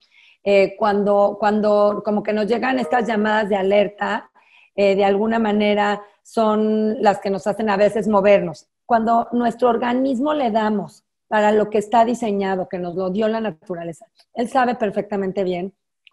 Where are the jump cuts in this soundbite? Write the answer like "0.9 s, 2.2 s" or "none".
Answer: 8.6 s